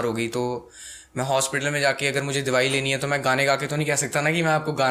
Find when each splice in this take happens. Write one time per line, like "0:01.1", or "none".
none